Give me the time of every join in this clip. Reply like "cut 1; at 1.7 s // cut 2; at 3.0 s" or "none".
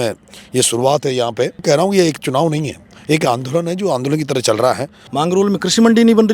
cut 1; at 1.6 s // cut 2; at 5.0 s